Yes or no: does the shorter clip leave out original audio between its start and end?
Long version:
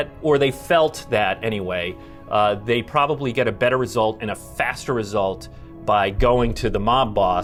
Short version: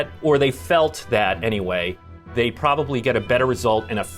yes